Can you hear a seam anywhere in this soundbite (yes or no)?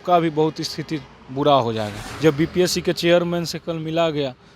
yes